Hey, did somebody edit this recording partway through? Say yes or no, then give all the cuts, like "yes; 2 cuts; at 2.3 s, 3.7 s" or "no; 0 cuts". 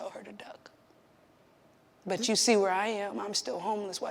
yes; 1 cut; at 2.0 s